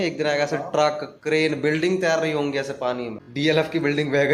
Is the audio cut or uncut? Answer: cut